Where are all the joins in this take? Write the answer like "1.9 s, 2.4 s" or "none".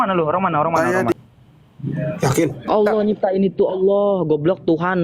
1.1 s